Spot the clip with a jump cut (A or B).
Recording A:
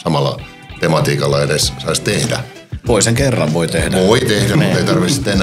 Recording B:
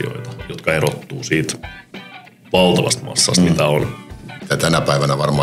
B